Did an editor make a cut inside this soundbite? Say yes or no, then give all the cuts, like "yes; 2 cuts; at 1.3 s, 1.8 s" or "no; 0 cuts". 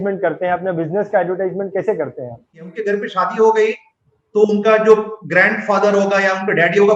yes; 1 cut; at 2.7 s